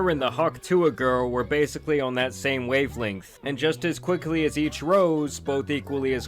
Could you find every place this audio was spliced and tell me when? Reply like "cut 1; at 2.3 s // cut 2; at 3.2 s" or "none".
none